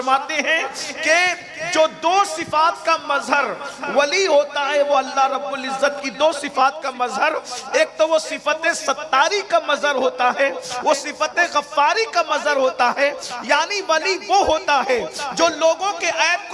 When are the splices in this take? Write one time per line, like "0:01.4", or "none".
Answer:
none